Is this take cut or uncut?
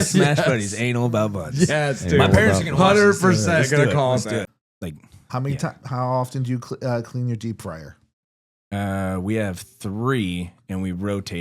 cut